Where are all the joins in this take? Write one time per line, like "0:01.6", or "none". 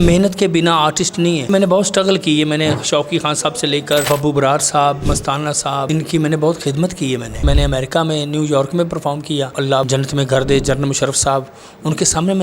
0:01.5
0:04.1
0:05.9
0:07.4
0:09.7